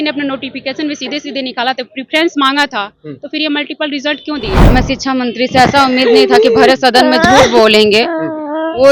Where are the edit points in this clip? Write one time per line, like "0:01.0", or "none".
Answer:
0:04.6